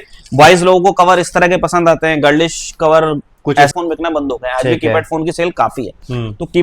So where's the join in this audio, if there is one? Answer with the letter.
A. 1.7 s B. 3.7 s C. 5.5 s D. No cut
B